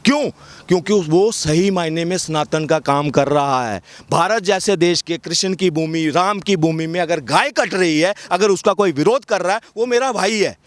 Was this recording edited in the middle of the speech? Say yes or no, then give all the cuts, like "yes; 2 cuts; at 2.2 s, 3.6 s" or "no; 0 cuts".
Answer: no; 0 cuts